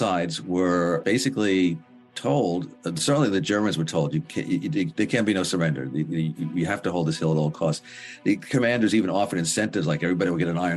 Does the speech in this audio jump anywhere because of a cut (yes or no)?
yes